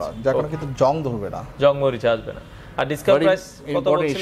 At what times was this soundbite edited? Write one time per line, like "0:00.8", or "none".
none